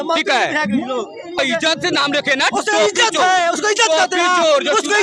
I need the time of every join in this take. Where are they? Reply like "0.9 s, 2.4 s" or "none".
1.4 s